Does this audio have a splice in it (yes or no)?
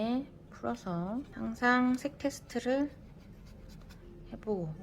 yes